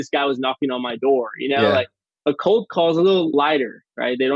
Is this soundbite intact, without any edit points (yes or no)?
no